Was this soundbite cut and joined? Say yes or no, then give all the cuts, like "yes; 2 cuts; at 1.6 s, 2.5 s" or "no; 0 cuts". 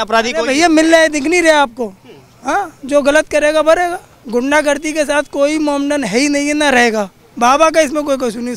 yes; 2 cuts; at 4.1 s, 7.2 s